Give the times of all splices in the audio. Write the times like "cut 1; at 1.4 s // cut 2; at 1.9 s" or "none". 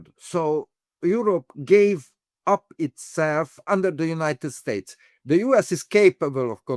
cut 1; at 0.9 s // cut 2; at 3.6 s